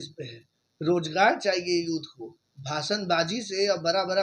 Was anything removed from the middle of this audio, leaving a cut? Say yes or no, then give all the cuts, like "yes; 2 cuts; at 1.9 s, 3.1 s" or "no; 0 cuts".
no; 0 cuts